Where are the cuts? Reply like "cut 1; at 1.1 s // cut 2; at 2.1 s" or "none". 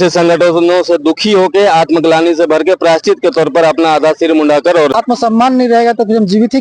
cut 1; at 5.0 s